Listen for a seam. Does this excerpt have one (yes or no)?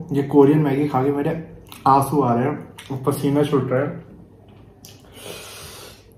no